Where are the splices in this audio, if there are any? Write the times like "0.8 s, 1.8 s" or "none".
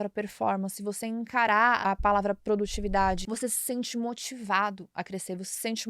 1.8 s, 3.3 s